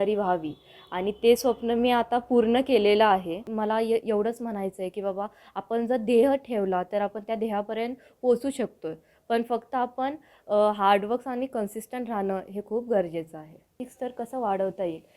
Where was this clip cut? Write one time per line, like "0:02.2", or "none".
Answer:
0:03.4
0:13.8